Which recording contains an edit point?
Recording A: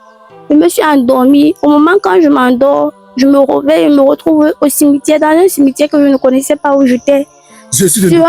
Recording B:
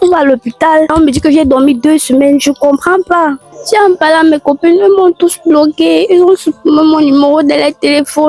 B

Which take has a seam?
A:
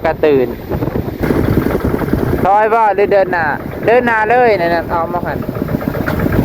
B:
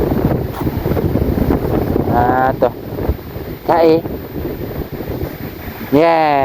A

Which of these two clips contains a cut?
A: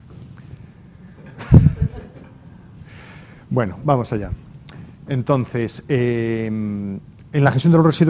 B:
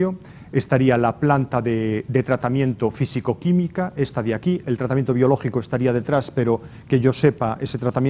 B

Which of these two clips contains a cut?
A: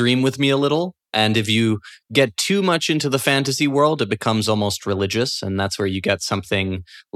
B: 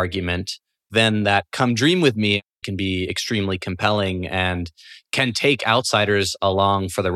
B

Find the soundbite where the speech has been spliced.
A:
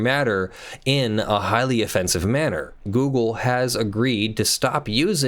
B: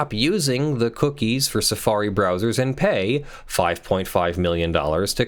A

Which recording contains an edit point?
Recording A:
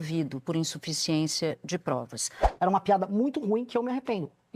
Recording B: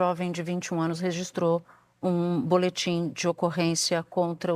A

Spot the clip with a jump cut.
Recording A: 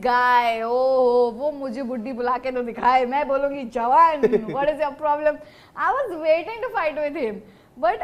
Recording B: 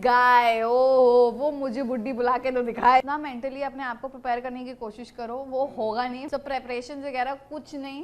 B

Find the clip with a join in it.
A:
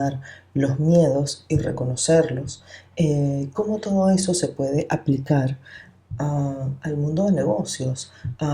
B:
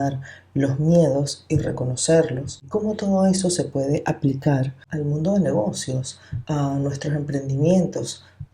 B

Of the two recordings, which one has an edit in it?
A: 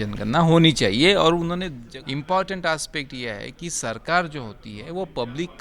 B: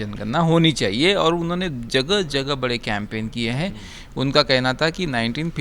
A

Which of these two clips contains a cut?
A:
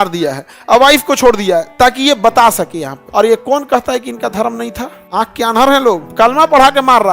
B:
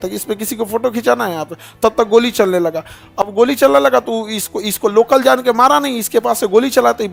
A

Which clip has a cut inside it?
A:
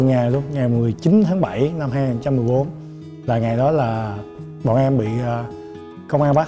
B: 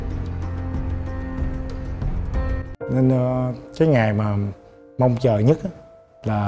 B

